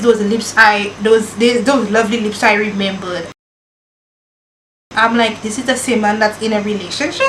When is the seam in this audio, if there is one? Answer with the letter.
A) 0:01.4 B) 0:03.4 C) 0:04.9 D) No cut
D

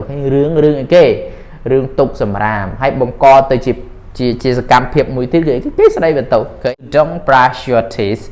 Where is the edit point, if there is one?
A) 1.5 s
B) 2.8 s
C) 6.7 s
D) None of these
C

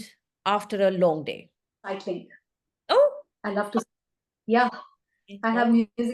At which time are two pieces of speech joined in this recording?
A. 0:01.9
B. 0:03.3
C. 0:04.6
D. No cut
A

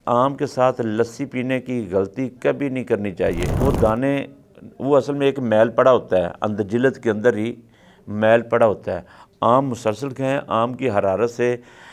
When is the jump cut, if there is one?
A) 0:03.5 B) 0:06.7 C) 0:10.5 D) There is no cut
A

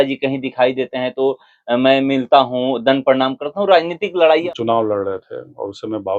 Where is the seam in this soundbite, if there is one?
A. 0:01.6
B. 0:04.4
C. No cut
B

